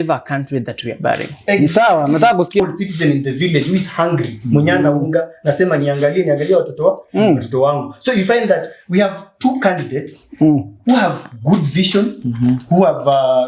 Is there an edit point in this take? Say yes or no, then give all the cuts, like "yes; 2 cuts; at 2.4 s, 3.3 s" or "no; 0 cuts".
yes; 1 cut; at 2.6 s